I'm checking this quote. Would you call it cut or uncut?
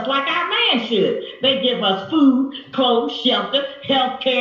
cut